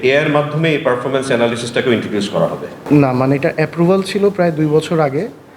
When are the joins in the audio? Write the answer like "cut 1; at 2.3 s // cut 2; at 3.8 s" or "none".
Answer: cut 1; at 2.7 s